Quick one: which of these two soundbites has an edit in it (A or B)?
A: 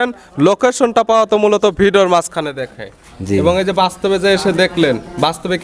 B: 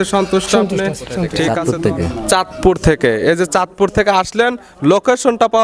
B